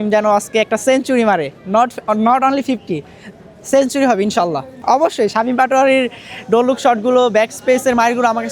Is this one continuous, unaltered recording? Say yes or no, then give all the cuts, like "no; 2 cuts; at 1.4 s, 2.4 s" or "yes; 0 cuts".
yes; 0 cuts